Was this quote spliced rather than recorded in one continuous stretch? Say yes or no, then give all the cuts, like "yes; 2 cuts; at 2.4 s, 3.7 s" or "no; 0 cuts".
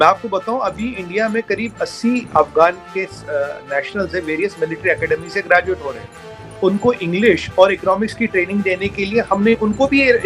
no; 0 cuts